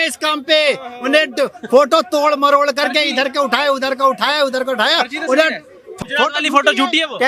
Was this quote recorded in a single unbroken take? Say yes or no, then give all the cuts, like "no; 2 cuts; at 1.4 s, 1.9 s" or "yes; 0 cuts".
no; 1 cut; at 5.9 s